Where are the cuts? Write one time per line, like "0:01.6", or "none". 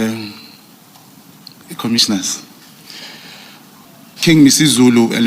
0:03.9